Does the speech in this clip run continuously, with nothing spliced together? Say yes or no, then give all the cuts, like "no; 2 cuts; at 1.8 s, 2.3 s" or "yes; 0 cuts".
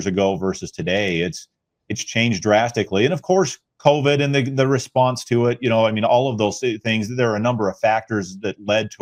yes; 0 cuts